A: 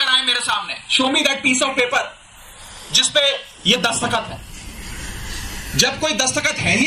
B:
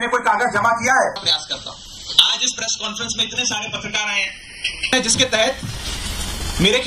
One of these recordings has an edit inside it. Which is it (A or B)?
B